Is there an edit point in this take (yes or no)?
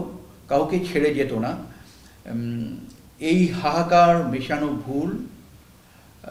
no